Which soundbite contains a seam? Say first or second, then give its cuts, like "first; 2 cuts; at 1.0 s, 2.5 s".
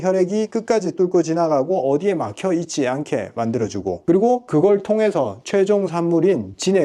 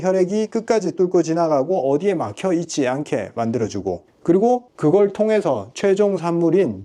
first; 1 cut; at 4.3 s